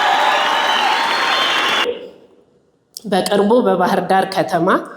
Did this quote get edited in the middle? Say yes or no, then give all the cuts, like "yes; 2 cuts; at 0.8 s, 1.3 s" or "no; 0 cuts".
yes; 1 cut; at 1.8 s